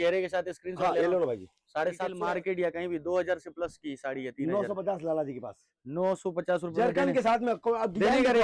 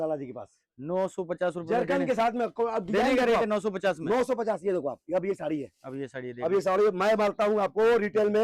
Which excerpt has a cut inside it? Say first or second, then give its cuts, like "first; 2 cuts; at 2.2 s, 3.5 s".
first; 1 cut; at 2.1 s